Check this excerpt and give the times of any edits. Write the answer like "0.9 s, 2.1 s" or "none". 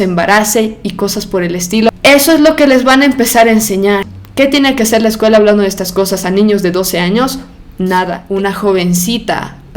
1.9 s, 4.2 s, 8.2 s